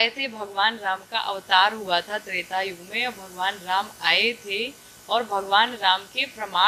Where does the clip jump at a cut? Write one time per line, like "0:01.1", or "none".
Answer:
none